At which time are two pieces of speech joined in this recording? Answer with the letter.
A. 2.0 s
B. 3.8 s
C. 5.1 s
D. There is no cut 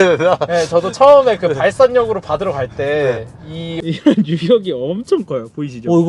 B